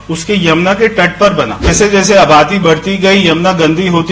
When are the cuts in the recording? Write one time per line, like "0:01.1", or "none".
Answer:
0:01.7